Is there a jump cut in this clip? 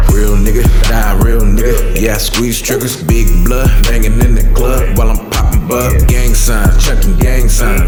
no; 0 cuts

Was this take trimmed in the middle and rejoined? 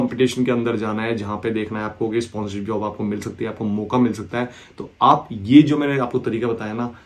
no; 0 cuts

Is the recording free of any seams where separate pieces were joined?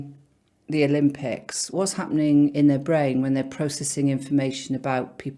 no; 1 cut; at 1.7 s

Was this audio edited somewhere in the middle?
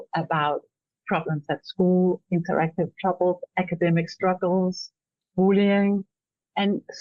no; 0 cuts

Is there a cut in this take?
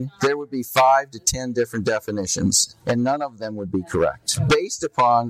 no; 0 cuts

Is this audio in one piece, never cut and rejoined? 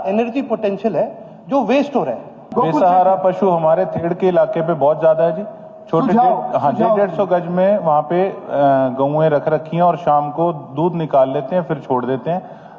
no; 1 cut; at 2.4 s

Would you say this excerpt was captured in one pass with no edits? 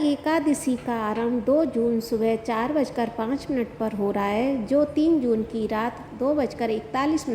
yes; 0 cuts

